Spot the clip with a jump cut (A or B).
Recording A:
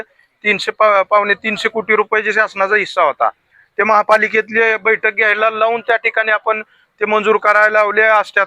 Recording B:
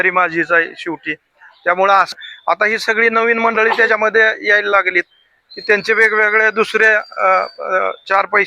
B